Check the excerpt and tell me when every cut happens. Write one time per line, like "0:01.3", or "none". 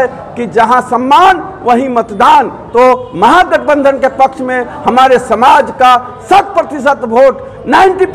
0:02.6